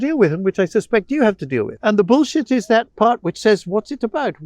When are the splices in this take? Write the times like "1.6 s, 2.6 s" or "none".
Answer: 1.7 s

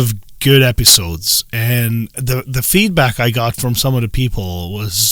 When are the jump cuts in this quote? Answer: none

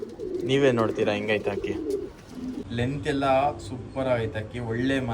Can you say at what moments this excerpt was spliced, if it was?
2.6 s

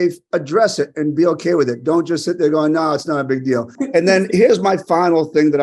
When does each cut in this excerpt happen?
3.8 s

